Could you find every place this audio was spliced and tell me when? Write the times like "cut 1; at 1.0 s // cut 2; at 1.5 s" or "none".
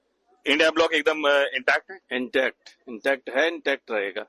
none